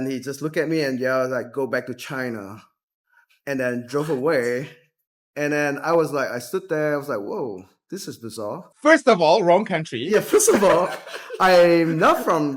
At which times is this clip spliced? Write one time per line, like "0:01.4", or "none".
none